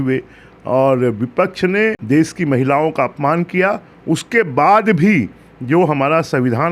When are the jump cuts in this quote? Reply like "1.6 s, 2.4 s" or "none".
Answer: 2.0 s

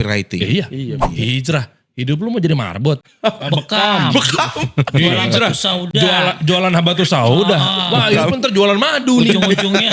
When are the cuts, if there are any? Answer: 1.1 s

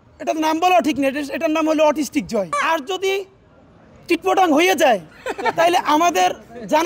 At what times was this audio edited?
2.6 s

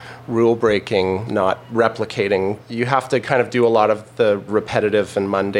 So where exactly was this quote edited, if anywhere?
1.4 s, 2.7 s, 4.5 s

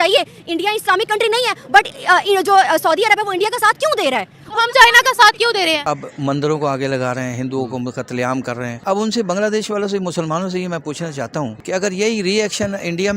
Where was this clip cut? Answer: 5.8 s

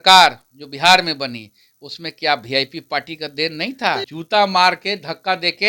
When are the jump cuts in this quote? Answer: 4.1 s

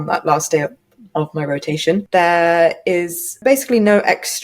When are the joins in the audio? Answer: 2.0 s, 3.4 s

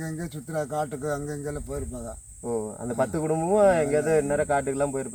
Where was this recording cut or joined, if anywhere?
none

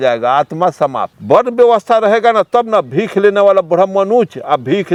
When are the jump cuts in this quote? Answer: none

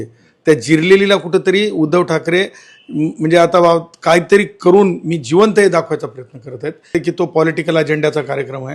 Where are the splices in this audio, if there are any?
6.9 s

